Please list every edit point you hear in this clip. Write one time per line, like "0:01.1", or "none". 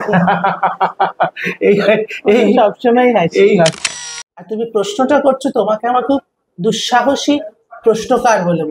0:03.7